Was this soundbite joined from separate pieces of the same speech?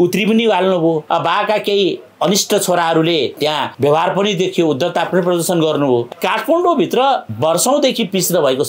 yes; 4 cuts; at 1.0 s, 3.5 s, 6.1 s, 7.3 s

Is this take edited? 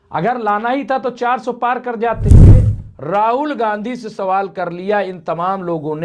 yes; 2 cuts; at 2.2 s, 2.8 s

